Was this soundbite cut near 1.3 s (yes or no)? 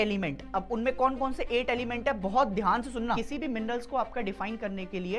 no